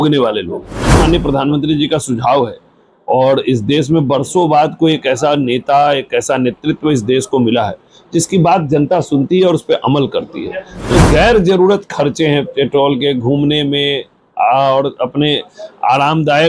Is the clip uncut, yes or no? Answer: no